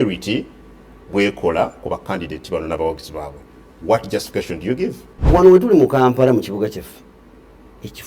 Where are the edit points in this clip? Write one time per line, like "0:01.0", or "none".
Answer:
0:05.1